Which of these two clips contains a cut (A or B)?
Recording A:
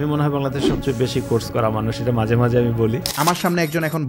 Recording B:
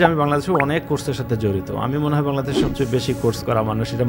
A